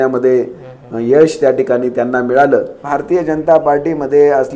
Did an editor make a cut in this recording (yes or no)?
yes